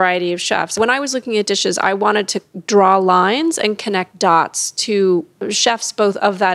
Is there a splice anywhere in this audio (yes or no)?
yes